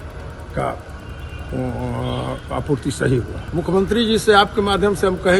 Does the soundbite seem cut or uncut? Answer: cut